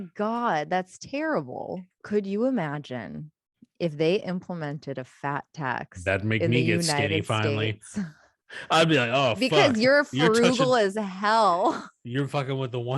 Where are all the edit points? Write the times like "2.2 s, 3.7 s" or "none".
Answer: 1.9 s